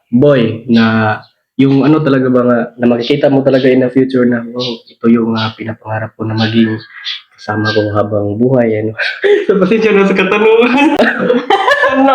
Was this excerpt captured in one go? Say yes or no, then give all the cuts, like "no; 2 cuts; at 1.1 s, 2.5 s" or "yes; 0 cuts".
no; 1 cut; at 11.0 s